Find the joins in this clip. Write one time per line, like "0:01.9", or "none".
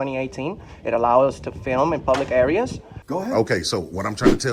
0:02.9